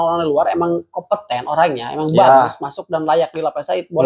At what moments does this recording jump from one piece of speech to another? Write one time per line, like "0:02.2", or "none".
none